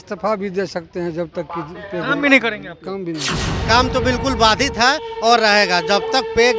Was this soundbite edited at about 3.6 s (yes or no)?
yes